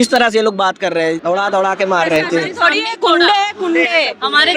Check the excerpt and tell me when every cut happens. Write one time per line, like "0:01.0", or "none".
0:01.1